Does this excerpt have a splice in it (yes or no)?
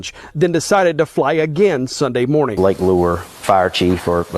yes